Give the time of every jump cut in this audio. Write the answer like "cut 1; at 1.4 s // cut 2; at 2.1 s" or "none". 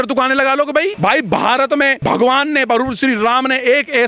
cut 1; at 0.9 s // cut 2; at 2.0 s